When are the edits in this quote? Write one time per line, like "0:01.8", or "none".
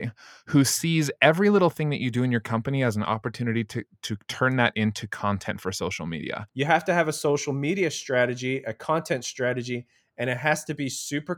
0:06.4